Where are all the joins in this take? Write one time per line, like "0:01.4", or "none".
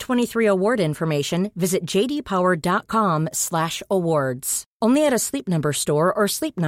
none